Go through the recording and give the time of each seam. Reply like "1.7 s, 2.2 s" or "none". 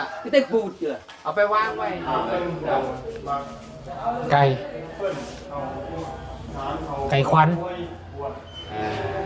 1.9 s